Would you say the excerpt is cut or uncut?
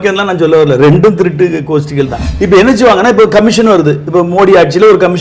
cut